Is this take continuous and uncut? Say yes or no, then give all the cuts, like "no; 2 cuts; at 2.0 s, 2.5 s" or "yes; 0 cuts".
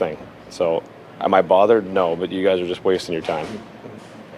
yes; 0 cuts